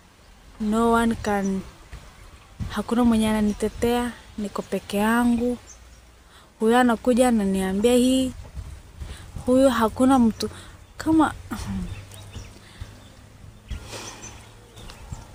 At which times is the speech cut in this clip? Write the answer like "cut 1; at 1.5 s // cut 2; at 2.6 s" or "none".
none